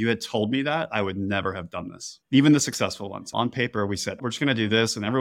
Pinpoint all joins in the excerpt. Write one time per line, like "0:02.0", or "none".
0:03.3
0:04.2